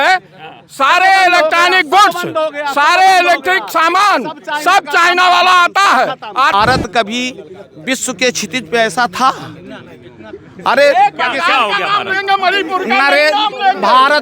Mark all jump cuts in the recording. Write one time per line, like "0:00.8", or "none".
0:06.5

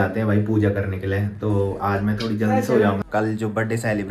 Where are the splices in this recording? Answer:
0:03.0

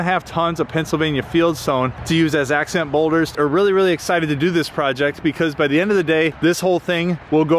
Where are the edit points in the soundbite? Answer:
0:03.3

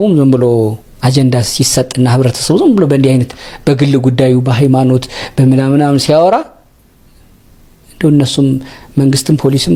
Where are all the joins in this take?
none

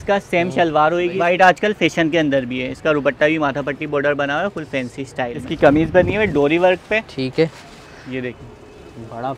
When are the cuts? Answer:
0:01.2
0:05.4

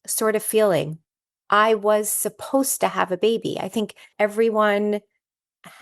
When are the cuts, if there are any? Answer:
0:04.1

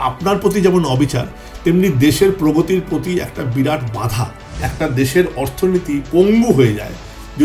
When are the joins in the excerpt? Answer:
0:04.7

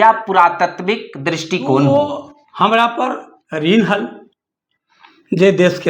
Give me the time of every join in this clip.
0:01.9

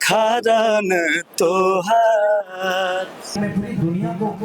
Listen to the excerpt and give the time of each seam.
0:03.3

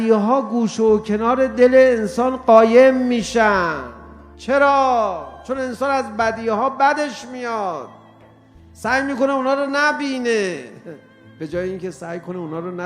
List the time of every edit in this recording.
0:04.3

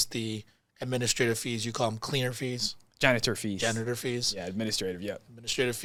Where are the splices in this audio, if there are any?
none

